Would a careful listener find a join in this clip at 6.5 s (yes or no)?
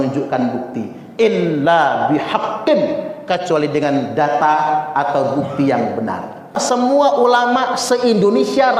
yes